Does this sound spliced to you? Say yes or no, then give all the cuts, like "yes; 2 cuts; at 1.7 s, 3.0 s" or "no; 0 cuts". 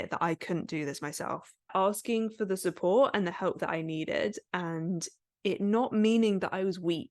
yes; 1 cut; at 1.7 s